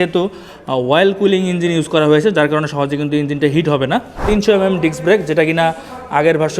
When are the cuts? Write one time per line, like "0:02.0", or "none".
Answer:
0:04.2